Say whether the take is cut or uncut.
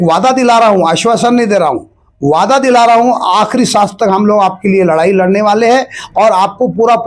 uncut